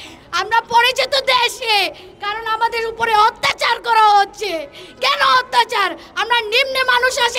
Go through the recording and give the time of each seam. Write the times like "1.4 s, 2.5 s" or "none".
none

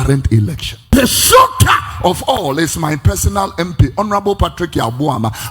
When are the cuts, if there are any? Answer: 0.9 s

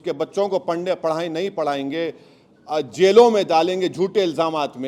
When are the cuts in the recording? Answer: none

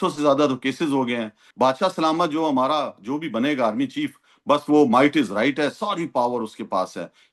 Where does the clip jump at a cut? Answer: 1.4 s

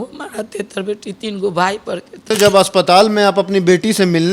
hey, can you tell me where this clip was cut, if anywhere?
2.3 s

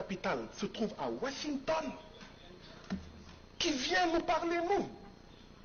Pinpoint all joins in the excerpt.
none

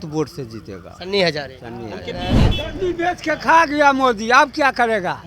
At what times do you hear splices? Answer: 2.5 s

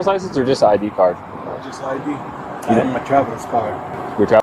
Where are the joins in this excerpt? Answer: none

